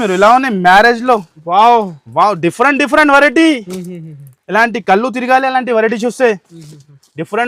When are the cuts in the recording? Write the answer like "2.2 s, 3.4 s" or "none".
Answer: none